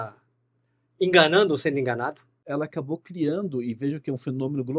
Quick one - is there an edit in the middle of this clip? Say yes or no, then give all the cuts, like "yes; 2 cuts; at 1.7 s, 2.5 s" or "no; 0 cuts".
yes; 1 cut; at 2.4 s